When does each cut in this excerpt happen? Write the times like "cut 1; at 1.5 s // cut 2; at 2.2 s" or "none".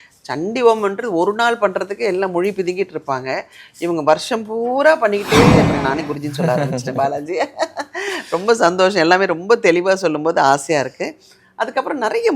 cut 1; at 5.7 s